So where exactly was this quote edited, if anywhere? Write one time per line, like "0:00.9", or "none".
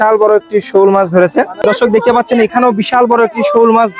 0:01.7